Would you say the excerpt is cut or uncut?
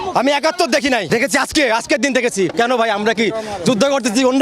cut